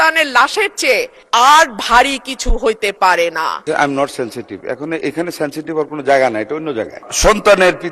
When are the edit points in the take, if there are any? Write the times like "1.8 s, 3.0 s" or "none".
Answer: 1.2 s, 3.6 s, 7.0 s